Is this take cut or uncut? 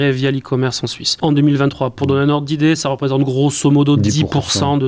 cut